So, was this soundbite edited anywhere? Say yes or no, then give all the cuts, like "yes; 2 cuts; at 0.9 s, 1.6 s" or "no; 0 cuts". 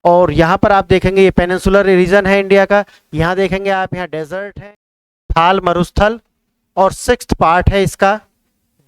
yes; 1 cut; at 4.5 s